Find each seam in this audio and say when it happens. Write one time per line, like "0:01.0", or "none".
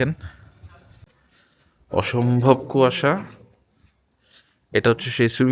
0:01.0